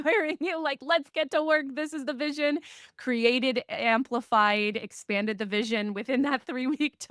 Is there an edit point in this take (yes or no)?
no